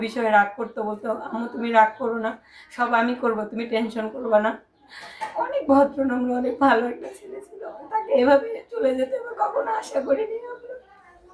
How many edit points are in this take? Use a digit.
0